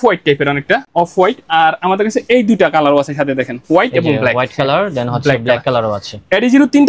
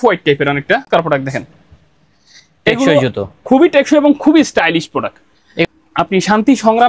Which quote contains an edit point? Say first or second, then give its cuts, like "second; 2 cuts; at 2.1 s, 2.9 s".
second; 2 cuts; at 0.9 s, 5.6 s